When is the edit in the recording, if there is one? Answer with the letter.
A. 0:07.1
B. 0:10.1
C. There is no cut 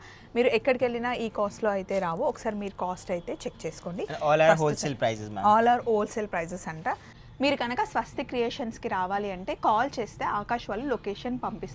A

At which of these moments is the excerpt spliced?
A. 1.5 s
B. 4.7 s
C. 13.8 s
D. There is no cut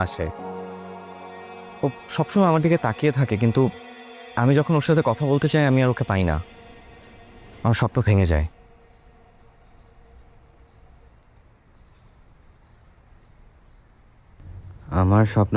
D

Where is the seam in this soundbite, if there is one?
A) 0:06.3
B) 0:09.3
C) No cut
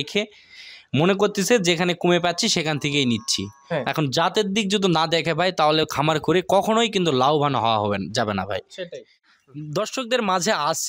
B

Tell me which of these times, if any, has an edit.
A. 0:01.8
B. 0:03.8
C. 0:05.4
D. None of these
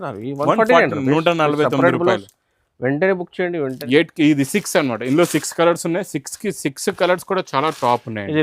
B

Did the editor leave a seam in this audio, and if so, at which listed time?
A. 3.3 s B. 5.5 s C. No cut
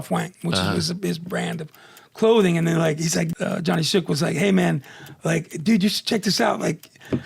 A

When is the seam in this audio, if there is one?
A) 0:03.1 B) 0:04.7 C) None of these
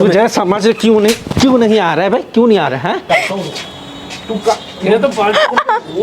A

